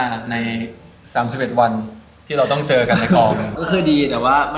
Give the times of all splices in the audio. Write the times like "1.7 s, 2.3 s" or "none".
3.6 s